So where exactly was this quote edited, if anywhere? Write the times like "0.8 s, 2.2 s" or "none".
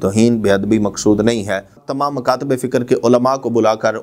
1.8 s